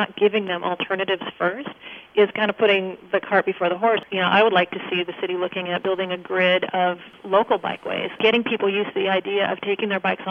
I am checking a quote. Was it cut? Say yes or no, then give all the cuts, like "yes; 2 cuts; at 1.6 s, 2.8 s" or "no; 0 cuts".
yes; 4 cuts; at 4.0 s, 5.8 s, 7.1 s, 8.2 s